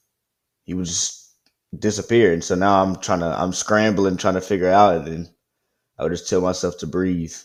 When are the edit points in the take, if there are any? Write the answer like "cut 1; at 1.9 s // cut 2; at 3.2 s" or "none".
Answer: none